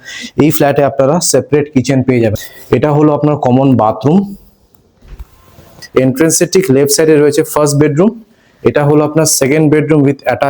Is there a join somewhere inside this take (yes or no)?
yes